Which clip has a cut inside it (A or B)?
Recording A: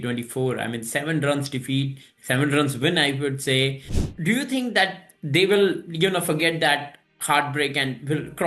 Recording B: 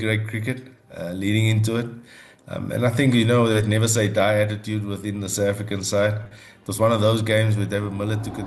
A